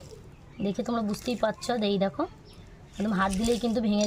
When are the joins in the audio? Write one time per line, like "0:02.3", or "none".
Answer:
0:03.1